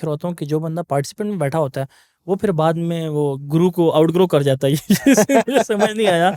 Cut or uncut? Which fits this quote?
uncut